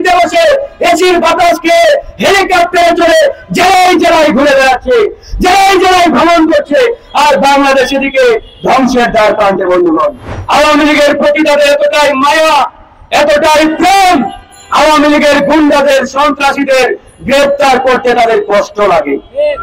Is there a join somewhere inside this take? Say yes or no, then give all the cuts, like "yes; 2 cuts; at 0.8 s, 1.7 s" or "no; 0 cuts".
yes; 1 cut; at 10.3 s